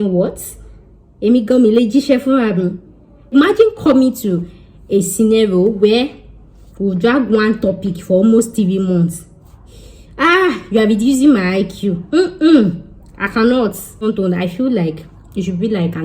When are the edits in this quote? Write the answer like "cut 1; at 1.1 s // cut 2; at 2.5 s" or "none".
cut 1; at 3.3 s // cut 2; at 14.0 s